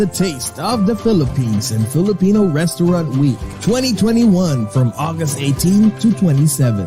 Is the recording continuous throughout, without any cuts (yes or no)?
yes